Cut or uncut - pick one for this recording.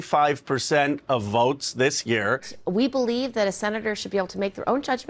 cut